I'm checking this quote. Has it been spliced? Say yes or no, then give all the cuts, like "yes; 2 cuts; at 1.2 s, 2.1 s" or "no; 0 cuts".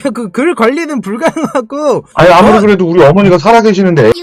yes; 1 cut; at 2.1 s